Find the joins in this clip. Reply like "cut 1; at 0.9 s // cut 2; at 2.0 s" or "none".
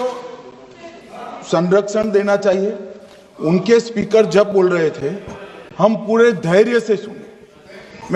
none